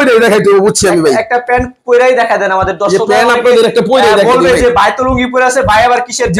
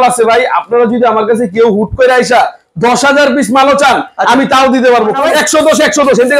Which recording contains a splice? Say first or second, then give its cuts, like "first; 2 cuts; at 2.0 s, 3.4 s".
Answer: second; 1 cut; at 5.2 s